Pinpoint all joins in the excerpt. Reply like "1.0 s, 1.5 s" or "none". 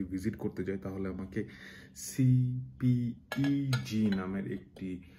none